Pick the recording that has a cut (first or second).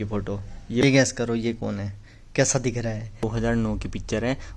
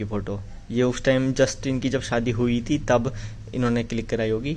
first